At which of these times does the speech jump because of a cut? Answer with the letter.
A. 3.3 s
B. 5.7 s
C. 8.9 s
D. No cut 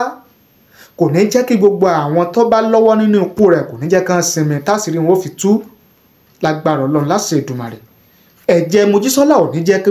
D